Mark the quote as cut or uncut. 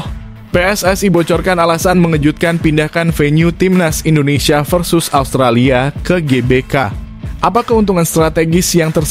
uncut